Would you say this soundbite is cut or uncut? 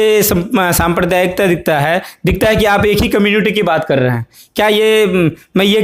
uncut